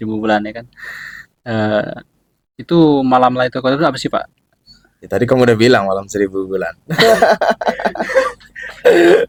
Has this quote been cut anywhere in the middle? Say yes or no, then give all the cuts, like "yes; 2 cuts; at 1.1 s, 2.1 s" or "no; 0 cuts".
no; 0 cuts